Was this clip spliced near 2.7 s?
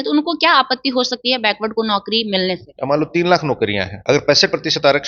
yes; 2 cuts; at 2.7 s, 3.9 s

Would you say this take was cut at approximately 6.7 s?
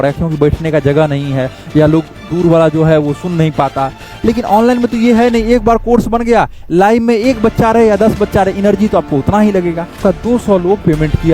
no; 1 cut; at 10.0 s

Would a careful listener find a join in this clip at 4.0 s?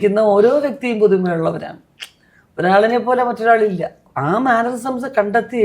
yes; 1 cut; at 4.0 s

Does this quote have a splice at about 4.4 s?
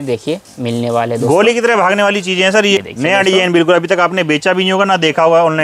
no; 1 cut; at 2.8 s

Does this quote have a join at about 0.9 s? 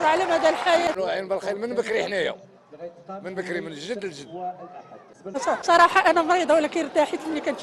yes; 2 cuts; at 0.9 s, 5.4 s

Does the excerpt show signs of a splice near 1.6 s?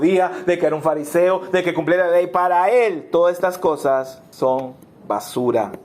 no; 1 cut; at 4.2 s

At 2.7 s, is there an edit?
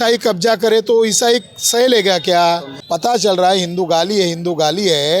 yes; 1 cut; at 2.7 s

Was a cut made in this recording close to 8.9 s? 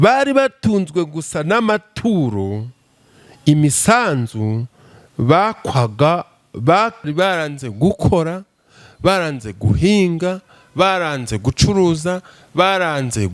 no; 1 cut; at 7.0 s

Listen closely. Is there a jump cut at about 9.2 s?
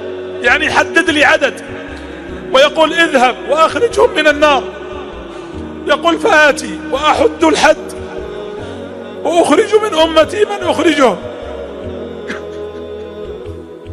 yes; 3 cuts; at 7.8 s, 9.2 s, 11.2 s

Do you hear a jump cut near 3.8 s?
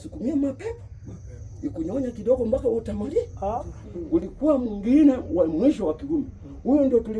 yes; 1 cut; at 3.8 s

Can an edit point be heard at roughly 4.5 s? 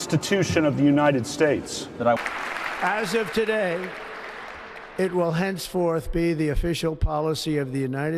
no; 1 cut; at 2.2 s

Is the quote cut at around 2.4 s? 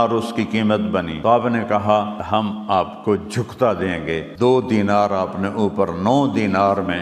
yes; 3 cuts; at 1.1 s, 2.4 s, 4.3 s

